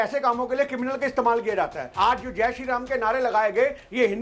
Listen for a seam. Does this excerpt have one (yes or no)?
yes